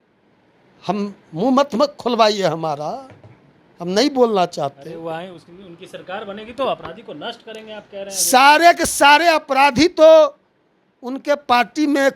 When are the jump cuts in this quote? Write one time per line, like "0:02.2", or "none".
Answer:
none